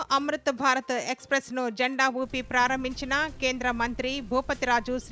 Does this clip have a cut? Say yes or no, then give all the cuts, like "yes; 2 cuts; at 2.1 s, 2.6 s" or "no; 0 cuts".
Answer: no; 0 cuts